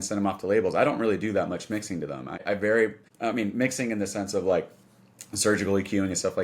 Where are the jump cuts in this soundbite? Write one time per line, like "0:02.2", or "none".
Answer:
0:02.4
0:03.1